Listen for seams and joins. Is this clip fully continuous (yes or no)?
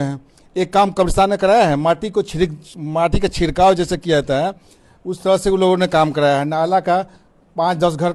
yes